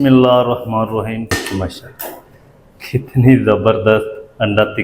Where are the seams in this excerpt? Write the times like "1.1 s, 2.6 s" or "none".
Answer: 1.3 s